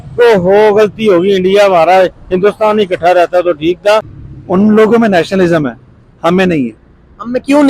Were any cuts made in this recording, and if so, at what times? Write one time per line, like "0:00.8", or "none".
0:04.2